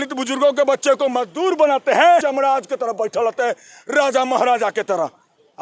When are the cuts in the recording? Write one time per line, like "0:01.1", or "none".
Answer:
0:02.2